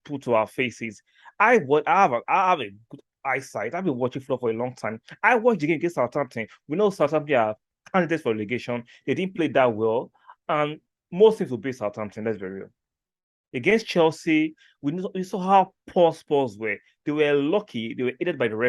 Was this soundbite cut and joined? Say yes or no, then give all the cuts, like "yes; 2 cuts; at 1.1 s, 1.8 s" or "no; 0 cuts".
no; 0 cuts